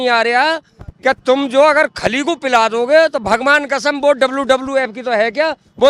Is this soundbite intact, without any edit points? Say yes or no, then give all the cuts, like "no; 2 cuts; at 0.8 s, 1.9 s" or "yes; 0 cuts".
yes; 0 cuts